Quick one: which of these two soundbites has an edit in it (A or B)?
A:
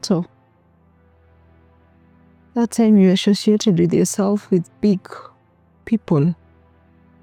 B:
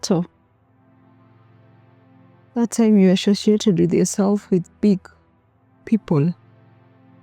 B